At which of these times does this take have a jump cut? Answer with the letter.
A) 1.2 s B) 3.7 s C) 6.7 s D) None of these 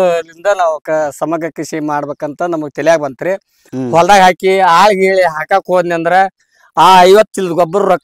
B